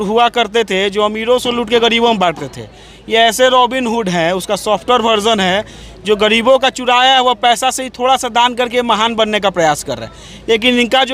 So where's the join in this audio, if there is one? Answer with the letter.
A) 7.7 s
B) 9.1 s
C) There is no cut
C